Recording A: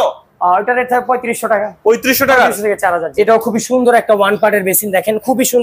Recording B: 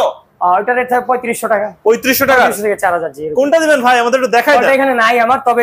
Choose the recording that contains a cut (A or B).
A